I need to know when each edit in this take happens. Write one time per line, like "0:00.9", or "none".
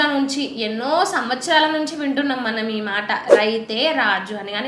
none